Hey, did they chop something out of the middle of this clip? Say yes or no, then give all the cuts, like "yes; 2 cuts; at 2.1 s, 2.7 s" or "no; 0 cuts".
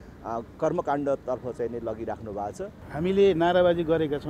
yes; 1 cut; at 2.8 s